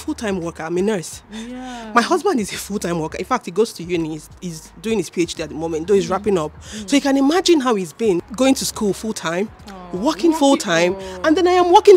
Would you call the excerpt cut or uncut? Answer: uncut